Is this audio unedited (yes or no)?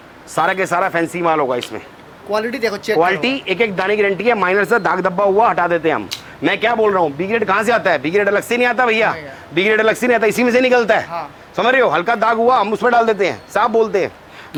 yes